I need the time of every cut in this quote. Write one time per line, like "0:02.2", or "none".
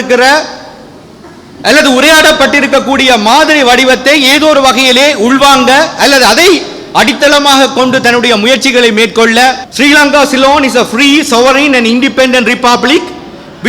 0:09.7